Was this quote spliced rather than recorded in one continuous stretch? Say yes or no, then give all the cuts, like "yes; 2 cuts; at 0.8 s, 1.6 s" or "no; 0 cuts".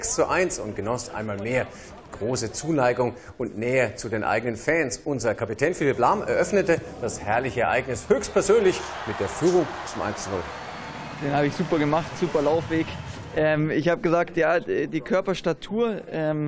yes; 1 cut; at 6.3 s